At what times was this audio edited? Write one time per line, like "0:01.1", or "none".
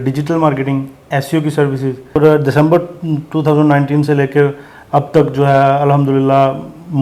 0:02.2